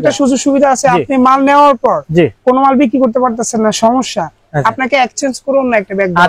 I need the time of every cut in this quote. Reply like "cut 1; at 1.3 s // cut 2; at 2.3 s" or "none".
none